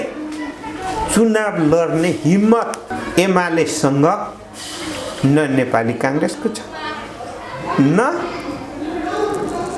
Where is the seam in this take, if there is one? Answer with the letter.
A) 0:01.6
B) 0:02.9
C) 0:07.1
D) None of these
B